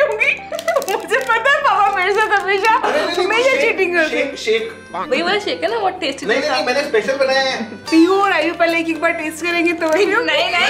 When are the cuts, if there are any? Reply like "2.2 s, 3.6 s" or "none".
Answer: 7.7 s